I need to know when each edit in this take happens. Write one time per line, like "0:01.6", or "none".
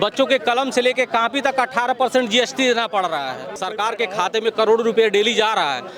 0:03.4